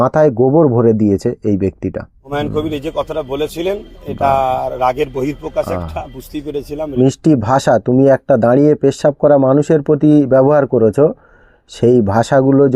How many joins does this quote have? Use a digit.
2